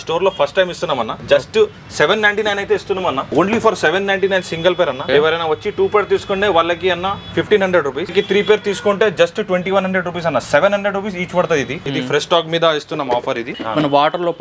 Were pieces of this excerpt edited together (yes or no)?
yes